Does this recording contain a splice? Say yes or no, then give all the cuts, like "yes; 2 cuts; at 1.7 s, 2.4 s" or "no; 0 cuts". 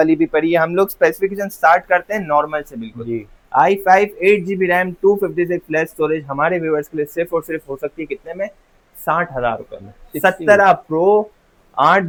no; 0 cuts